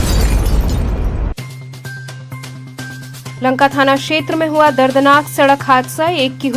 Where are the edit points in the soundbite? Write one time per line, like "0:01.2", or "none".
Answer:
0:02.9